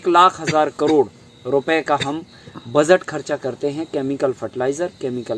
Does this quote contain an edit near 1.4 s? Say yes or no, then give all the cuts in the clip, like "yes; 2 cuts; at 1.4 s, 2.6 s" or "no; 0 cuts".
no; 0 cuts